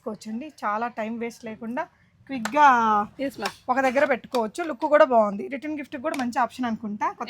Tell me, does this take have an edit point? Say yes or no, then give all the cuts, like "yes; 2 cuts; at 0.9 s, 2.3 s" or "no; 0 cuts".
no; 0 cuts